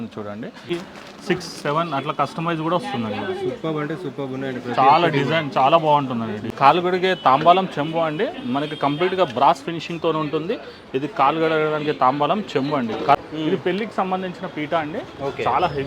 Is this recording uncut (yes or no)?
no